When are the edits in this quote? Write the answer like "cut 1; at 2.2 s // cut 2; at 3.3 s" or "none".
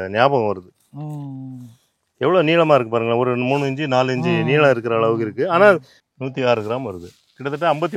cut 1; at 5.9 s